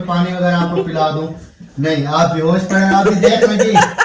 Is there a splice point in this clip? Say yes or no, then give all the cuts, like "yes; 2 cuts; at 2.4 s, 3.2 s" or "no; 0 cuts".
no; 0 cuts